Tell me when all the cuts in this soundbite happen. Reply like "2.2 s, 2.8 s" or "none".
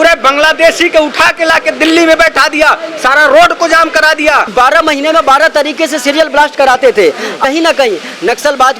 4.5 s, 7.4 s